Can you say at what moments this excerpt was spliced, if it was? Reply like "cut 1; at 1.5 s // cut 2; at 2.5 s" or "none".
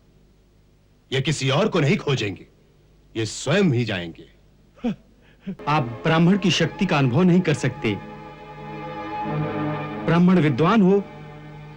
cut 1; at 5.6 s